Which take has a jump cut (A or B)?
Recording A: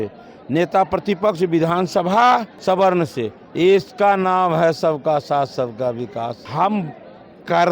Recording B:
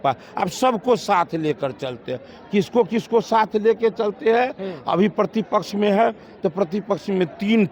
A